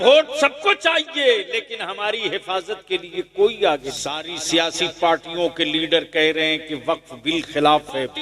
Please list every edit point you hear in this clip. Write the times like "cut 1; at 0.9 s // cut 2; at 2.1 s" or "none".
cut 1; at 4.3 s